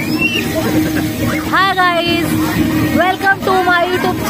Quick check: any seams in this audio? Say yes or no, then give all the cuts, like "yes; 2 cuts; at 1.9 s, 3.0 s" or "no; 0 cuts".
yes; 1 cut; at 1.5 s